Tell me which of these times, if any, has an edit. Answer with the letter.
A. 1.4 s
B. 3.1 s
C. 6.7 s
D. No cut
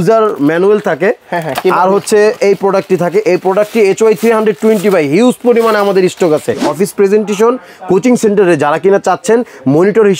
C